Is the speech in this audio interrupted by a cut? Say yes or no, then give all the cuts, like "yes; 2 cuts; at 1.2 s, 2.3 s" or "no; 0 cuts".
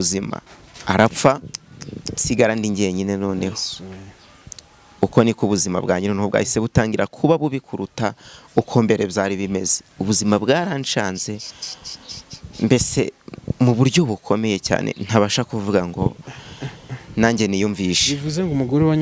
no; 0 cuts